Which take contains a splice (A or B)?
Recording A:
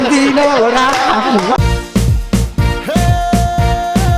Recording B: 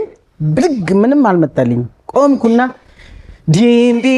A